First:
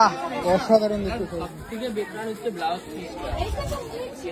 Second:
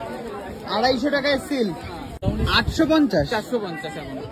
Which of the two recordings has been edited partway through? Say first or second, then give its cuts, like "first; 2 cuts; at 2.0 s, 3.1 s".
second; 1 cut; at 2.1 s